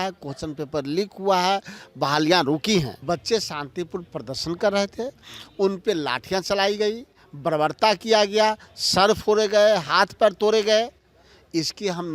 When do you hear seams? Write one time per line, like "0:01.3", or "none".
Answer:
0:02.9